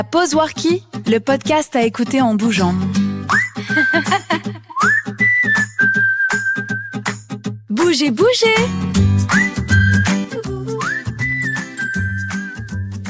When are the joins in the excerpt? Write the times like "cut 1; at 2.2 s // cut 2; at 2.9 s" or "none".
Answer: none